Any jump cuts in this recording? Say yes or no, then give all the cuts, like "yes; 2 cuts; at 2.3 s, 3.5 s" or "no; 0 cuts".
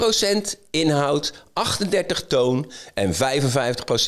no; 0 cuts